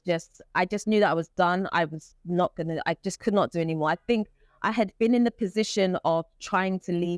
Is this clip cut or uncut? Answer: uncut